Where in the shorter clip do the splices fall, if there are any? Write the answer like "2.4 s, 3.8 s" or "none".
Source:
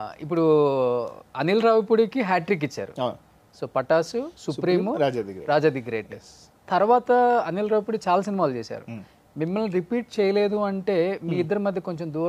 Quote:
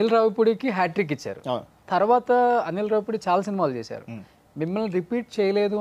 1.7 s